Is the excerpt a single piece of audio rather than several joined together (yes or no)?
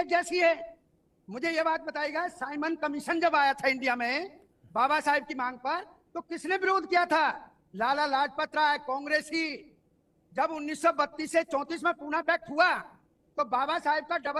yes